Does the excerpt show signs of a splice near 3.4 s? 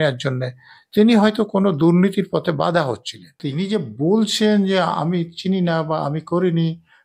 yes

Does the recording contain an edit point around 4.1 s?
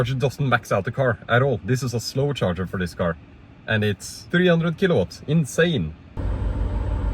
yes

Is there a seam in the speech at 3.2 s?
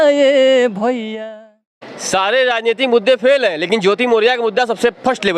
no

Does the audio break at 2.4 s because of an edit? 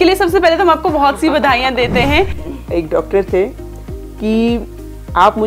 yes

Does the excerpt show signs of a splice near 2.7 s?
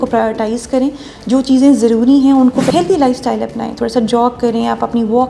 yes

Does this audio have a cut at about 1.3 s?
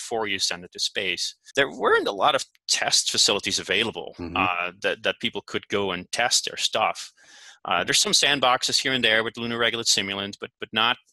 yes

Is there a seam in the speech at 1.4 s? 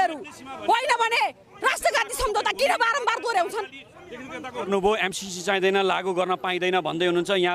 no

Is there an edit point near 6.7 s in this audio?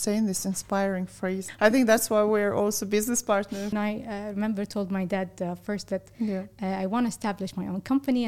no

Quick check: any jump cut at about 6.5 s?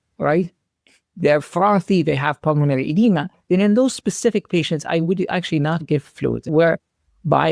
yes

